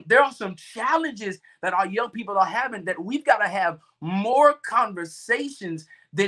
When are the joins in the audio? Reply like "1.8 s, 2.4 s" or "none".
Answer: none